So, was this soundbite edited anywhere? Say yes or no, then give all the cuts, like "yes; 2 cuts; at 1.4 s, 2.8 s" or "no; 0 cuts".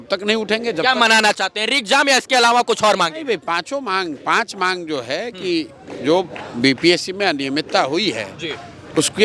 no; 0 cuts